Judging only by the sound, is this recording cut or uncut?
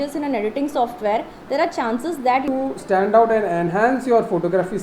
cut